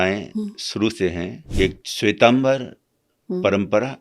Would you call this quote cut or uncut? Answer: cut